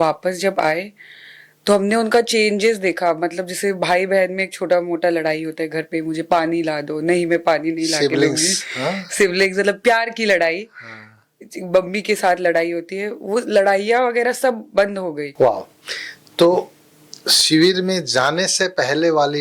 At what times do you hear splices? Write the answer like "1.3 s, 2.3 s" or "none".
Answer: 15.2 s

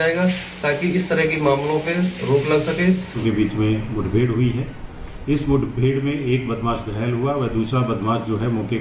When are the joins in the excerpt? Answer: 3.1 s

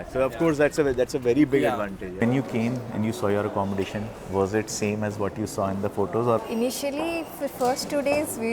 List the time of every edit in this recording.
2.0 s, 6.4 s

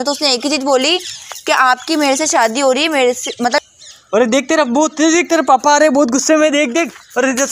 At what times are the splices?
3.6 s

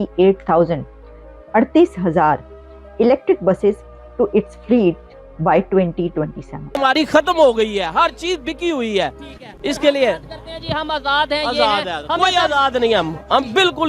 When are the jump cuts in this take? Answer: 6.8 s

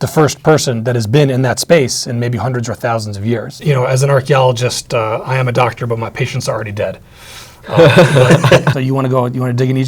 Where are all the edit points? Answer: 3.6 s, 8.7 s

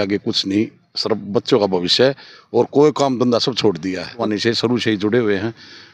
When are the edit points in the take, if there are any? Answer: 4.2 s

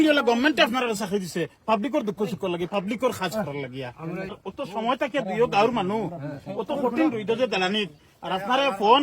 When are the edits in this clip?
4.4 s

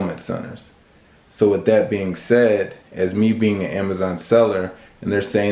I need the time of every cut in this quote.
none

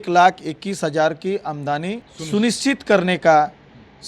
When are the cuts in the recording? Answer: 2.1 s

